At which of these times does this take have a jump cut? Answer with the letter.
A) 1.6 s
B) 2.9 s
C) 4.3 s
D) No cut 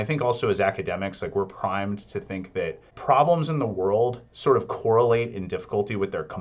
B